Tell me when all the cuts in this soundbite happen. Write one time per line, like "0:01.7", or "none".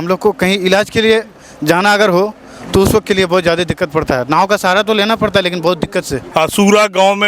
0:06.2